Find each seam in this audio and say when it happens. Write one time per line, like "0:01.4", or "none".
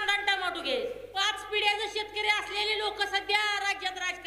0:01.1